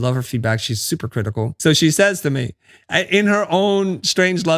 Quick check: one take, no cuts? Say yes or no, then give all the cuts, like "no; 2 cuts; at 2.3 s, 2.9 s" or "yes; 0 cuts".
no; 1 cut; at 1.6 s